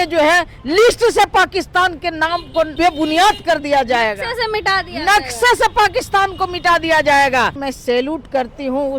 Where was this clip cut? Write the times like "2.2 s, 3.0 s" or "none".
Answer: 2.7 s, 7.7 s